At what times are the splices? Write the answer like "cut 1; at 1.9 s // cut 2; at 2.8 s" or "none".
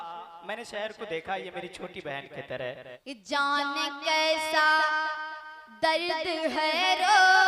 cut 1; at 2.9 s